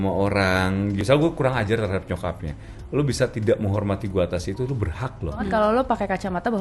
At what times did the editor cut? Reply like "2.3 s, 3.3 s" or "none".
1.0 s, 5.5 s